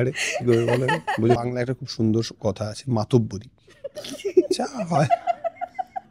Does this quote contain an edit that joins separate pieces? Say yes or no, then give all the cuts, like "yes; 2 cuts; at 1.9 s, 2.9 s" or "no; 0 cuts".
yes; 1 cut; at 1.4 s